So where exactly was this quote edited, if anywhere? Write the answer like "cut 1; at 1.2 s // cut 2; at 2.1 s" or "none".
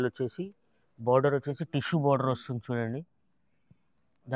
none